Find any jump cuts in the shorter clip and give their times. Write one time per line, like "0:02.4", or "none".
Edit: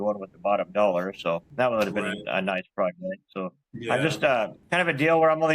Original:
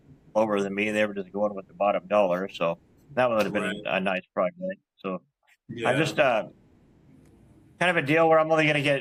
0:01.5
0:03.3
0:04.6